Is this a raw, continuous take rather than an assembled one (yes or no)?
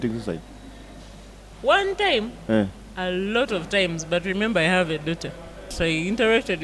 no